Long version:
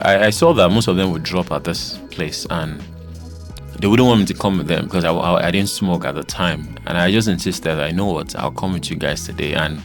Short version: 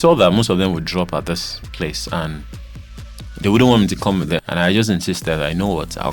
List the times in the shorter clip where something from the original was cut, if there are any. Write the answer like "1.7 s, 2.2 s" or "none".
4.4 s